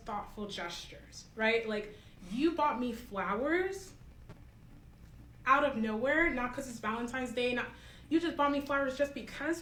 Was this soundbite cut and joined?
no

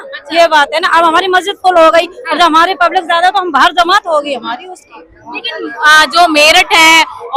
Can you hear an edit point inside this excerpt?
no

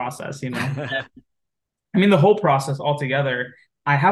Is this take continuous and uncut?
yes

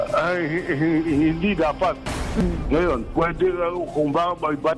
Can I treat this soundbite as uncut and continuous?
no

